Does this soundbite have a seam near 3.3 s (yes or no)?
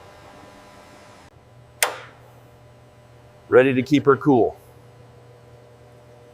no